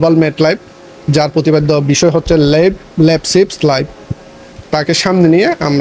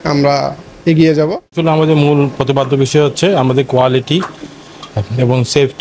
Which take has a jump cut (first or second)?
second